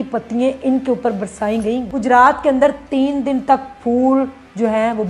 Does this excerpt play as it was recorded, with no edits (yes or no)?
no